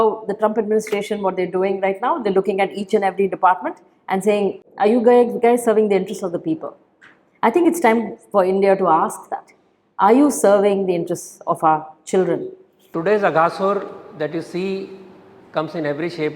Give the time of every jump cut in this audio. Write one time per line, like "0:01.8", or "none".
0:12.9